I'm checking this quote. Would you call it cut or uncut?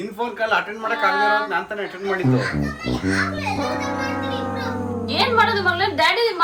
uncut